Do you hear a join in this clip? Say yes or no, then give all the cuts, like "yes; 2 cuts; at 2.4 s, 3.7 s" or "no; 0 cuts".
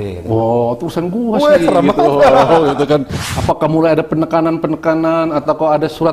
yes; 1 cut; at 3.2 s